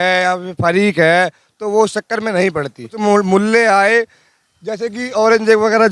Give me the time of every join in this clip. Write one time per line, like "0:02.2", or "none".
0:02.9